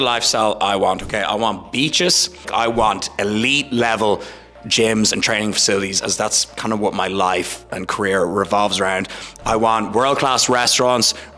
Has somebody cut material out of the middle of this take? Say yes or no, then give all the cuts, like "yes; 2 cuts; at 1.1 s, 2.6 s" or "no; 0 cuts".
yes; 1 cut; at 2.4 s